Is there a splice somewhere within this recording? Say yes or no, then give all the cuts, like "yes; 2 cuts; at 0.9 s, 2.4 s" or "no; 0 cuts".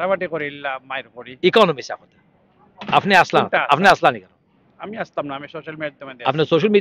no; 0 cuts